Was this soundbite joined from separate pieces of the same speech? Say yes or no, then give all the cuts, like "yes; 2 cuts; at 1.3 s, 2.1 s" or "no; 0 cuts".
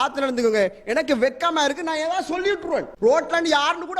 yes; 1 cut; at 2.9 s